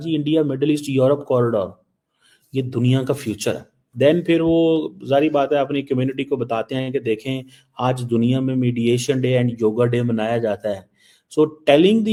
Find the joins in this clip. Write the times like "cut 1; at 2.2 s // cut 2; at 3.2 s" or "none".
none